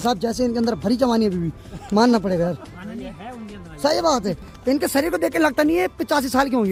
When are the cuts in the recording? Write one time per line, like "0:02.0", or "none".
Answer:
none